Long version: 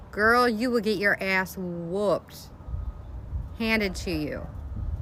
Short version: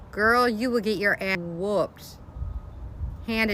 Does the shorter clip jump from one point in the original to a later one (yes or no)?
yes